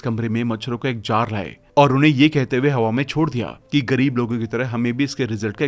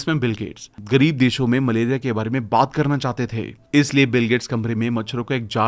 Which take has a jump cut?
second; 1 cut; at 3.5 s

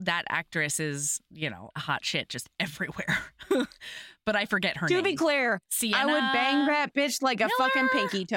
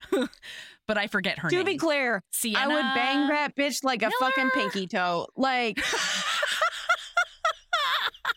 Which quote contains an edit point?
first; 1 cut; at 1.6 s

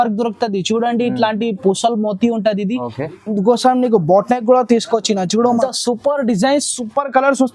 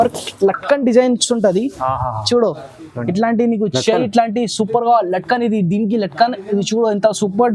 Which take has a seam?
first; 1 cut; at 5.6 s

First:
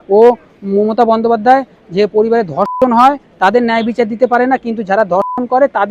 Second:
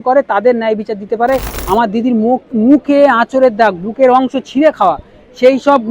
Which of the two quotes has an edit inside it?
second; 1 cut; at 1.5 s

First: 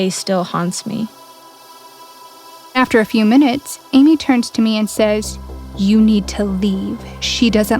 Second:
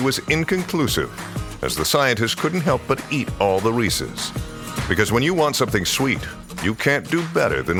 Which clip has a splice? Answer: first; 2 cuts; at 1.1 s, 2.8 s

